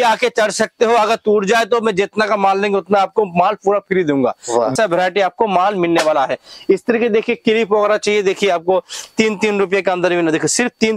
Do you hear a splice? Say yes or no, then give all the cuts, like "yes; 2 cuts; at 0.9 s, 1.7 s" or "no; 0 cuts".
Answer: yes; 1 cut; at 4.7 s